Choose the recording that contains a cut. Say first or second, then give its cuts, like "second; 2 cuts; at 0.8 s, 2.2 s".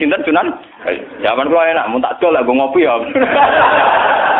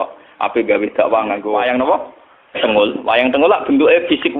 second; 1 cut; at 1.5 s